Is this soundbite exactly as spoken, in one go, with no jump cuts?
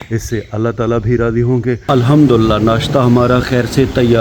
no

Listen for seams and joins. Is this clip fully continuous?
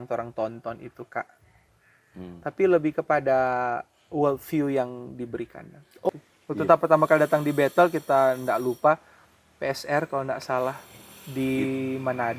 no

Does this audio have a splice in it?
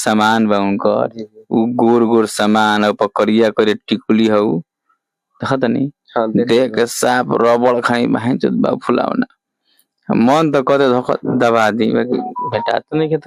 no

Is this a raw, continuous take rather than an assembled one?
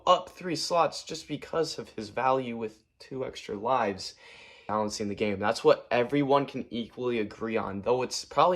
no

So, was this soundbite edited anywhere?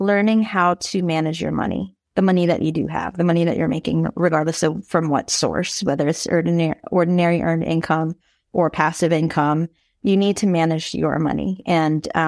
no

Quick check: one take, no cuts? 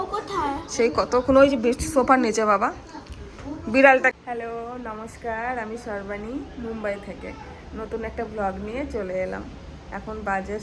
no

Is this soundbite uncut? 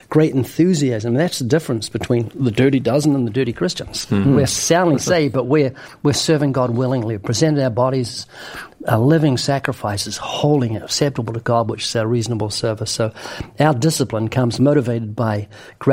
no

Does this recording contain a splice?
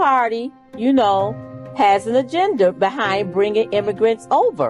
no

